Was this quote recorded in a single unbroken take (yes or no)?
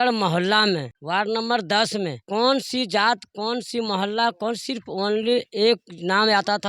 no